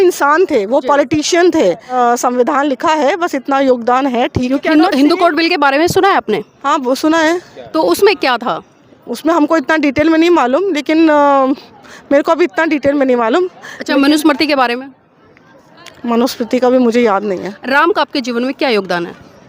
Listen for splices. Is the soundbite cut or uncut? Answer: cut